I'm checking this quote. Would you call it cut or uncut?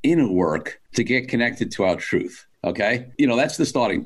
uncut